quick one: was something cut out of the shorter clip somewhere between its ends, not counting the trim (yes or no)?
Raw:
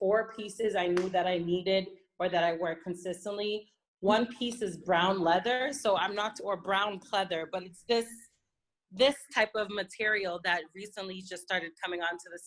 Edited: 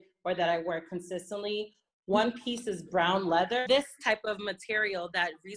yes